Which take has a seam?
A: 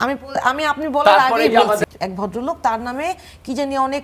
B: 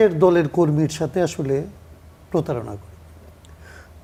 A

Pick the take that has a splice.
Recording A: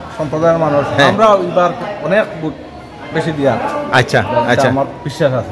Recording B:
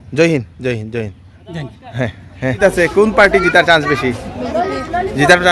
B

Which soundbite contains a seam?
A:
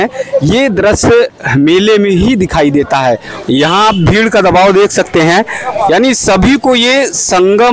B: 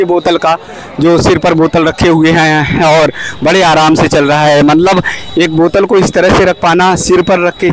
A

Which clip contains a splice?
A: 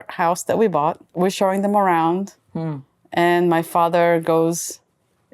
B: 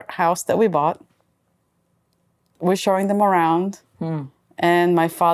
A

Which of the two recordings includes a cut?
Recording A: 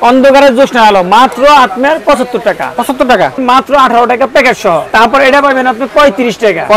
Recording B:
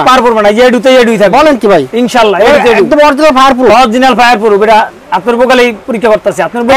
A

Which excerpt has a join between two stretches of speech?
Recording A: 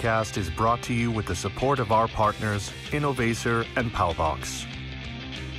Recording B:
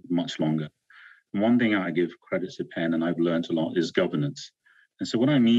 A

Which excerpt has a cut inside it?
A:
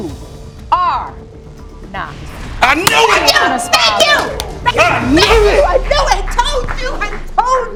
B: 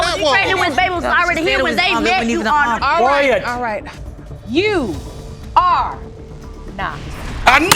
B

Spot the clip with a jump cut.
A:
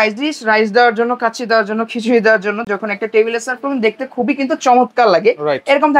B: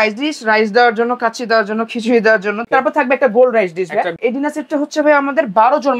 B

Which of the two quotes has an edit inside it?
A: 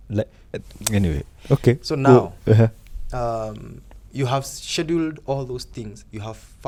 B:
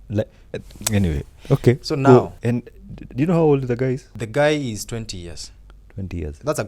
B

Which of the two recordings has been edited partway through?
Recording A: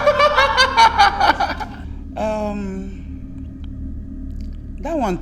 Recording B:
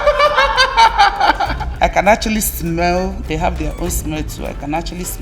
B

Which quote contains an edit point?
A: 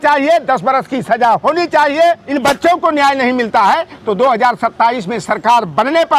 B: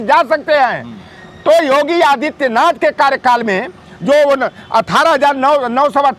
A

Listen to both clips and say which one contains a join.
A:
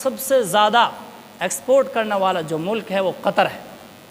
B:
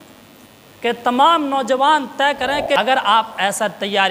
B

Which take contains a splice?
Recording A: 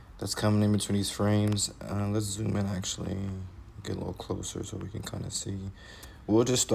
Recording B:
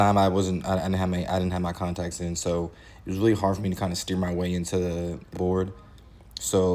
B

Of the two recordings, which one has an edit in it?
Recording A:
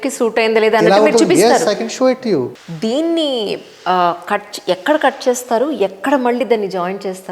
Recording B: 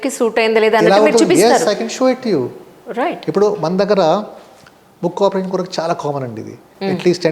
A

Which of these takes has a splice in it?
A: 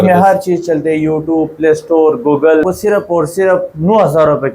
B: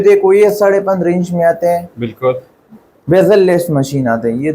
A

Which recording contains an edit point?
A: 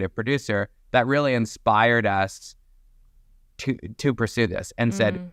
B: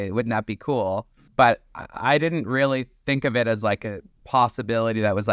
B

